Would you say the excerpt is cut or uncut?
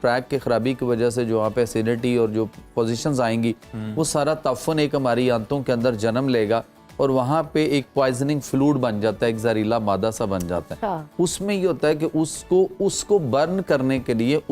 uncut